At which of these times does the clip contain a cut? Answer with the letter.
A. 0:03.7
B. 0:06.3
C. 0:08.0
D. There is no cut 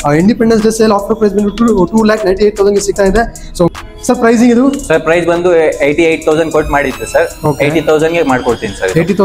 A